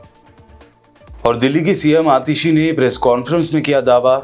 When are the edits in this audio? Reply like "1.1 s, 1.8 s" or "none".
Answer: 1.1 s